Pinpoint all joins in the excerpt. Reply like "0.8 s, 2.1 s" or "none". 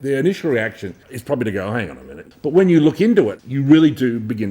1.1 s, 2.2 s, 3.4 s

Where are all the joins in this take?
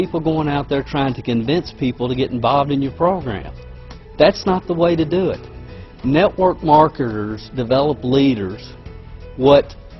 7.9 s

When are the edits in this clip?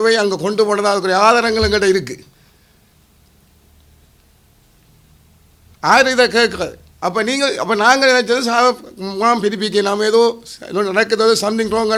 none

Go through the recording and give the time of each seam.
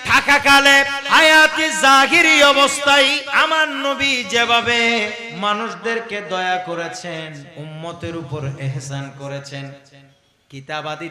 1.0 s, 3.3 s, 5.2 s, 7.5 s

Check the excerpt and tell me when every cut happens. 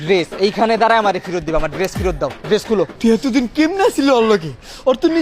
2.9 s

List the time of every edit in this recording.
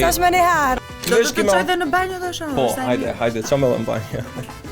1.0 s

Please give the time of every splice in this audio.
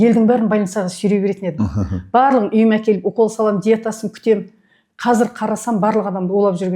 none

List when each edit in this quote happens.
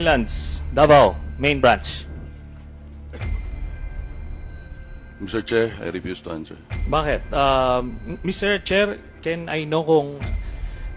none

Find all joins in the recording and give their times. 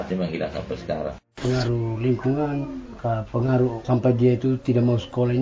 1.2 s, 2.8 s, 3.8 s

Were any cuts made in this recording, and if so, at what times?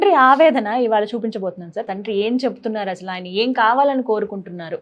1.8 s

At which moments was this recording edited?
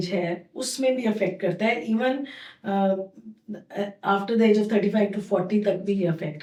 none

